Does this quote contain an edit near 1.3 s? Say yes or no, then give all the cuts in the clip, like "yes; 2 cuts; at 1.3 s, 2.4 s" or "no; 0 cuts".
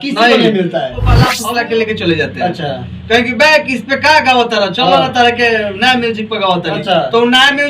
yes; 1 cut; at 1.3 s